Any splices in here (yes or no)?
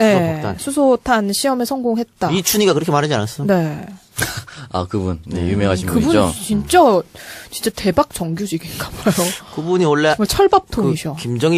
no